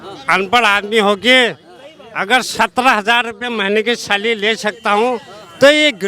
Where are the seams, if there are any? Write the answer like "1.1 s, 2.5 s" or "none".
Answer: none